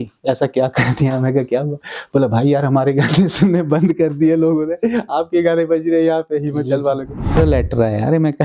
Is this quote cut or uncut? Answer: cut